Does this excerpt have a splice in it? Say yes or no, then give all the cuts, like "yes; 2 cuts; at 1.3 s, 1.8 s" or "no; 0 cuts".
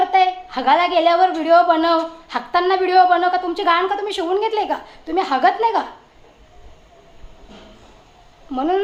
no; 0 cuts